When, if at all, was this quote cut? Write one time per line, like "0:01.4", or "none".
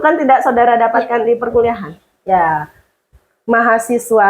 0:02.3